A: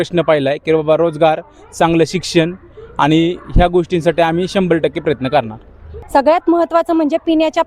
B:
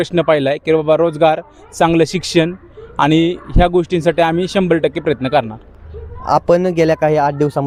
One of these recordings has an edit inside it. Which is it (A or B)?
A